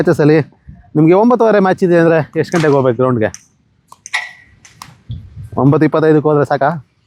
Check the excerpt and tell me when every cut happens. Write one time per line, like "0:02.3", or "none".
none

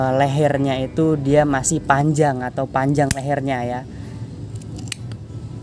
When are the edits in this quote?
none

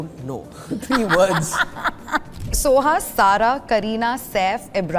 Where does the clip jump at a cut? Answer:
0:02.5

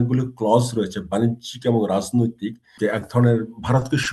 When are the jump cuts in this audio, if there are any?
0:02.7

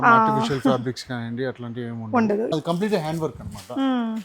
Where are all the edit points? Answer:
0:02.6

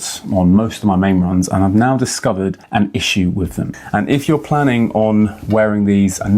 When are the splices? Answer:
0:03.7

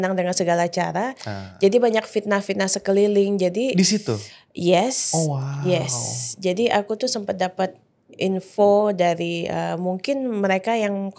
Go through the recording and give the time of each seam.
none

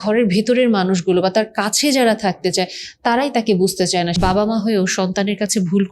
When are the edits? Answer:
0:04.2

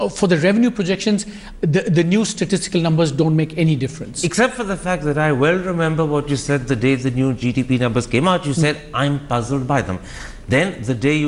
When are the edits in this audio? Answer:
none

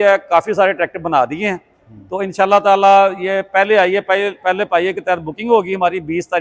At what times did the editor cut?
none

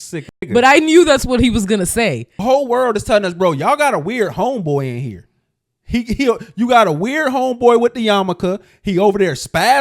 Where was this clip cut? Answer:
0:02.3

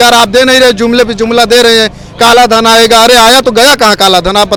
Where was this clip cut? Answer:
none

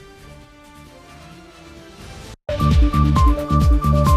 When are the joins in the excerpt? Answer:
0:02.4

